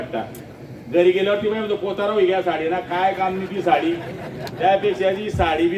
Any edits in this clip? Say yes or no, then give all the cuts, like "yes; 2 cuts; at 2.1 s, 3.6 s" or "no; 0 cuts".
no; 0 cuts